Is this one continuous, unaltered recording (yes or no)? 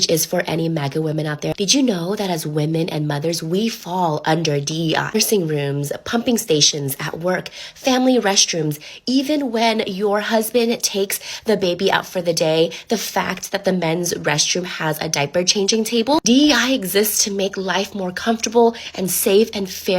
yes